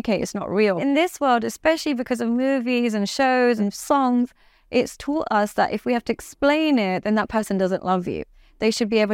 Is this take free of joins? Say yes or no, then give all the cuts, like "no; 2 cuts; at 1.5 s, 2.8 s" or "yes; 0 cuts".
no; 2 cuts; at 0.8 s, 3.6 s